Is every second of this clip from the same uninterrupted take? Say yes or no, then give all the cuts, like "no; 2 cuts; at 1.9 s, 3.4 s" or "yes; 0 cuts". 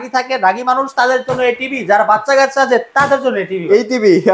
yes; 0 cuts